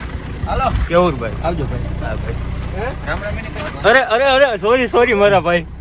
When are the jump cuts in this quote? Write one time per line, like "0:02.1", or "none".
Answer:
0:03.6